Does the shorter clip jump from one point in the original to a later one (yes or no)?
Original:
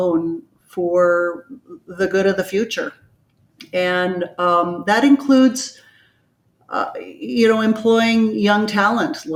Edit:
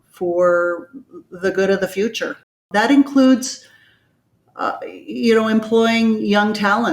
yes